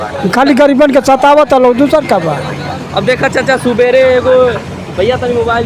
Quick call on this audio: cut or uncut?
uncut